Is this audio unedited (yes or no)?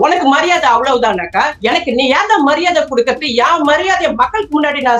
no